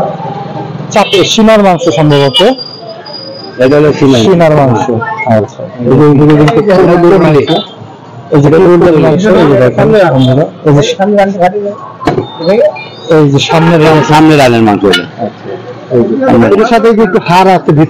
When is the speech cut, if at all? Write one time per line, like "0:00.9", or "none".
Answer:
none